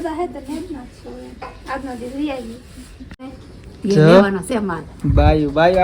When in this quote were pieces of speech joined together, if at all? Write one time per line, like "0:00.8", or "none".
0:03.3